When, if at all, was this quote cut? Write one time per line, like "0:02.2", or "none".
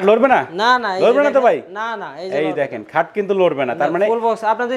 none